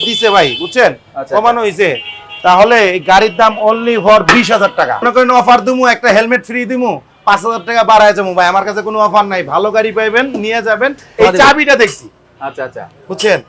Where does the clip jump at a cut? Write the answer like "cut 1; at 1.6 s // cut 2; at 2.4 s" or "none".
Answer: cut 1; at 5.1 s // cut 2; at 11.0 s